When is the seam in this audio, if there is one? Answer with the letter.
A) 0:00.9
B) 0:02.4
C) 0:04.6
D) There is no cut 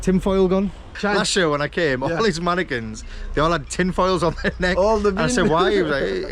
A